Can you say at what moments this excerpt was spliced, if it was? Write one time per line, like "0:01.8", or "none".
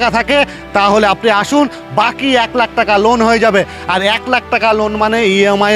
none